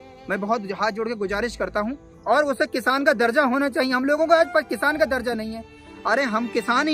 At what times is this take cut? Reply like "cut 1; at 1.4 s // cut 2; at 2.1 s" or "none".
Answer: cut 1; at 2.1 s